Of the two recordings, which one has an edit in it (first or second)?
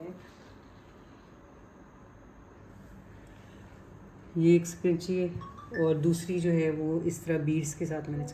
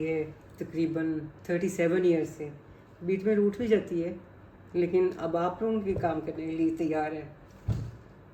first